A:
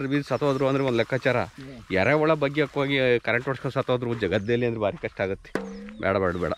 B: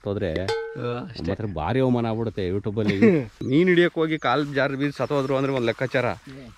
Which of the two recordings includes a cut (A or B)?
B